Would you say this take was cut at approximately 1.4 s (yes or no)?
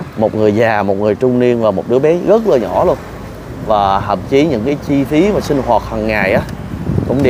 no